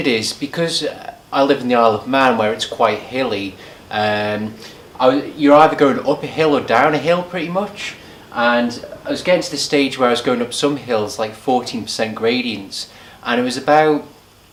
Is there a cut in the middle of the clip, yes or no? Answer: no